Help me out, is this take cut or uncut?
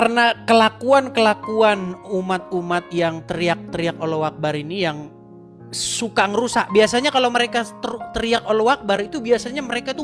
uncut